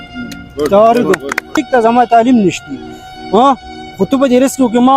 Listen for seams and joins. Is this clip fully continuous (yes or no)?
no